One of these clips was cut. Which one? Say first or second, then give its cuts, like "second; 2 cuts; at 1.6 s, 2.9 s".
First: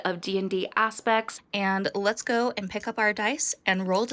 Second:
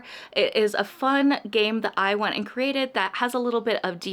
first; 1 cut; at 1.4 s